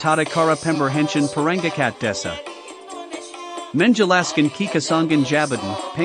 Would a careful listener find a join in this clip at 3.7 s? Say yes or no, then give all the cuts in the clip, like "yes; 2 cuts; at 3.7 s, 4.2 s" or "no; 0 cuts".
yes; 2 cuts; at 2.1 s, 3.7 s